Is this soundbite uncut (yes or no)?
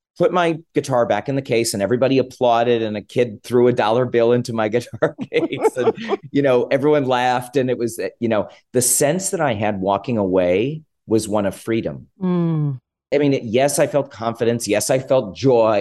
no